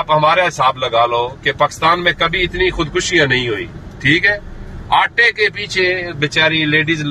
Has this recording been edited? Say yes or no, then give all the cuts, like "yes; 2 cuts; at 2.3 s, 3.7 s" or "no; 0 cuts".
no; 0 cuts